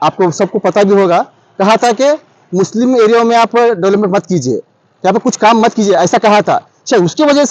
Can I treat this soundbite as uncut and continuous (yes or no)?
yes